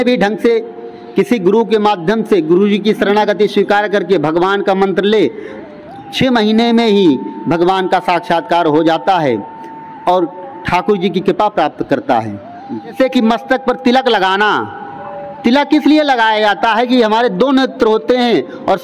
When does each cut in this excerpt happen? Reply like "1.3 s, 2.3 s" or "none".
12.9 s